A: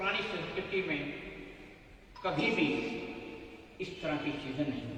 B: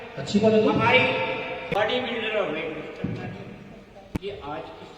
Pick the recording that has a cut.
B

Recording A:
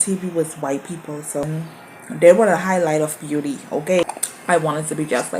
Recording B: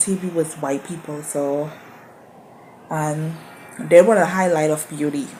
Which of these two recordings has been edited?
A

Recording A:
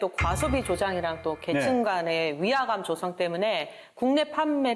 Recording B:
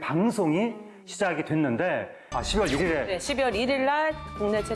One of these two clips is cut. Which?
B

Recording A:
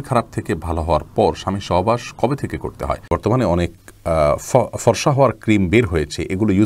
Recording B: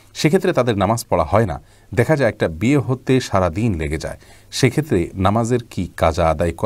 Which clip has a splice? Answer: A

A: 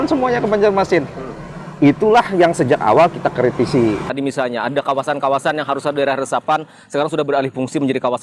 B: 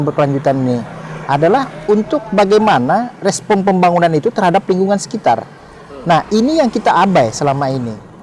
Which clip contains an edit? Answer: A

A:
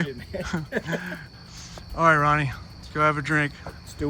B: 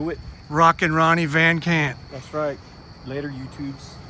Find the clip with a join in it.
A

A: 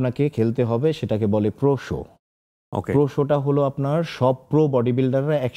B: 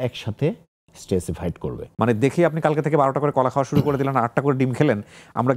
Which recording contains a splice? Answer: B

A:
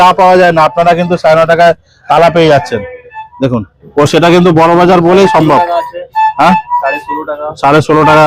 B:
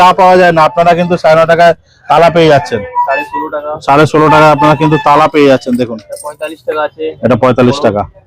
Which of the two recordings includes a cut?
B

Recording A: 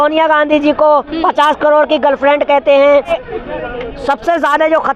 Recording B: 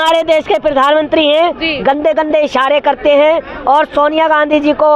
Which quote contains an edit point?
A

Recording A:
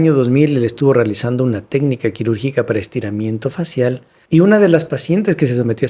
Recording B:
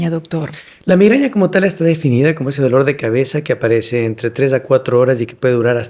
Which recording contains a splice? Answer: A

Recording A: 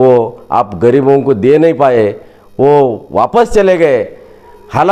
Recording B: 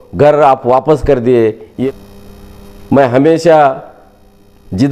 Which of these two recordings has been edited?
B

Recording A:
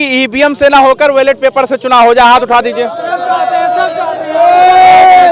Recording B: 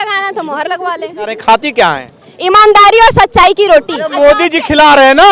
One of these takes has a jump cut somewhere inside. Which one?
B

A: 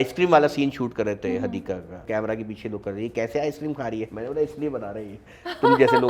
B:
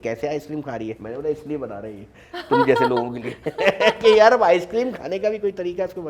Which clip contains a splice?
A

